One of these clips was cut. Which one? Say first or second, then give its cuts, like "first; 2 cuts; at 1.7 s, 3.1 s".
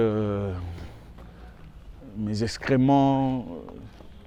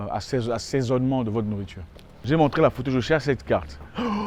second; 1 cut; at 2.2 s